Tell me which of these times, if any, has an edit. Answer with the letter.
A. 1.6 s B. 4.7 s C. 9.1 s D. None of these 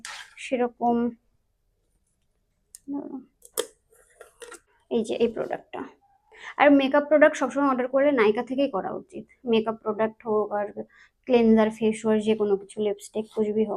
B